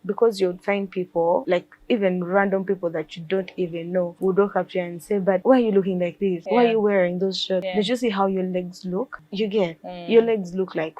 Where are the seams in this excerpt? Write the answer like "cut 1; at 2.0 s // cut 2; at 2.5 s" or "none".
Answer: cut 1; at 1.4 s // cut 2; at 4.1 s // cut 3; at 5.4 s // cut 4; at 6.4 s // cut 5; at 7.7 s // cut 6; at 9.2 s

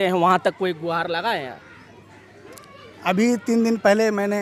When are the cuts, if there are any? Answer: none

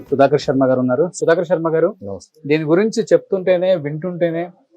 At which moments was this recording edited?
none

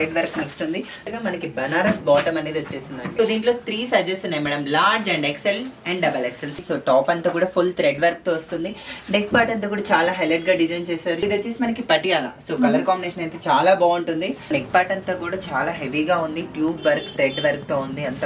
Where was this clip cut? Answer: cut 1; at 1.1 s // cut 2; at 3.0 s // cut 3; at 6.6 s // cut 4; at 11.2 s // cut 5; at 14.5 s

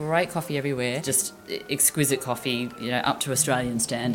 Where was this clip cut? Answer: cut 1; at 1.0 s

